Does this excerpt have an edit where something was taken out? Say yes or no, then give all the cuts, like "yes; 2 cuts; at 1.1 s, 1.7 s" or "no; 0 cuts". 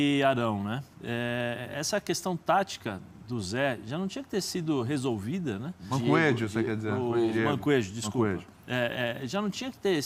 no; 0 cuts